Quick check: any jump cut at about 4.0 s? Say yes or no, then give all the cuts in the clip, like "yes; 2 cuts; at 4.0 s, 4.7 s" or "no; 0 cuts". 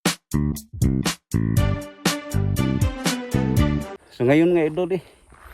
yes; 1 cut; at 4.0 s